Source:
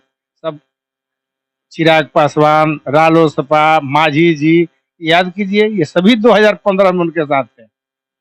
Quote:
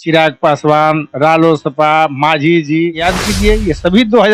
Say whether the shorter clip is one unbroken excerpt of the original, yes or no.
no